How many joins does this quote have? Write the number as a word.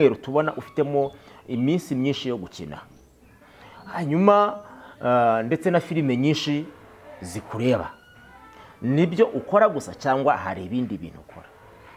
zero